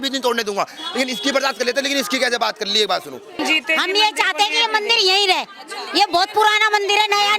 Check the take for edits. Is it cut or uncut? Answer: cut